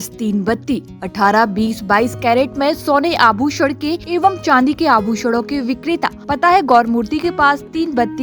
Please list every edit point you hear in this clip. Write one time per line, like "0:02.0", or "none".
0:04.0
0:06.2